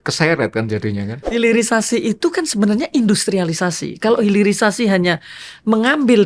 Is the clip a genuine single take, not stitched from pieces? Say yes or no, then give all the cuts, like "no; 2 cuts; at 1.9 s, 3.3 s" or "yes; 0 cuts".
no; 1 cut; at 1.3 s